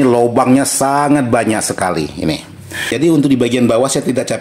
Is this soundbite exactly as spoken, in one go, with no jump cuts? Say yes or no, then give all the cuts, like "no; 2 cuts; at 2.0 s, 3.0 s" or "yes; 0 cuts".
no; 1 cut; at 2.9 s